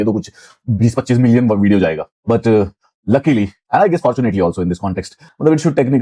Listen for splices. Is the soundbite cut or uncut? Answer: uncut